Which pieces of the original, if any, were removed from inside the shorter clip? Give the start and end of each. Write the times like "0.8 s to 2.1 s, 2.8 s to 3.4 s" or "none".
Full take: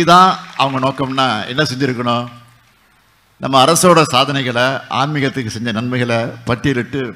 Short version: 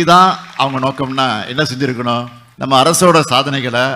2.4 s to 3.2 s